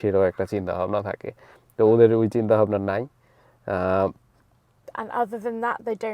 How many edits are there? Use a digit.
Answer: 1